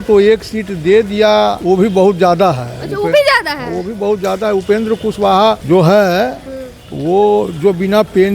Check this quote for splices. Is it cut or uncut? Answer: cut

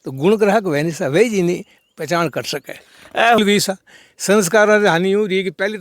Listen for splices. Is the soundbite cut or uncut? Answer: cut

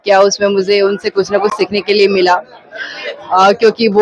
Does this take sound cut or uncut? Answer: uncut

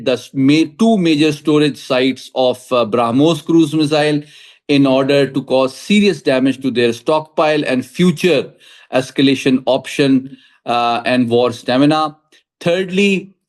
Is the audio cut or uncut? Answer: uncut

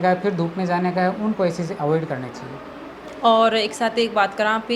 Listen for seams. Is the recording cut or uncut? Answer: uncut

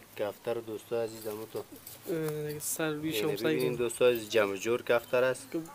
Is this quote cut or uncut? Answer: uncut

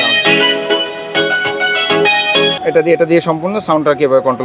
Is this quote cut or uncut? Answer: uncut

